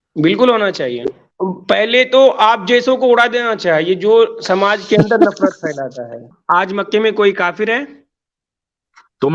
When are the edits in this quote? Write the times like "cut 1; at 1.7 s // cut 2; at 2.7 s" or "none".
cut 1; at 1.2 s // cut 2; at 6.2 s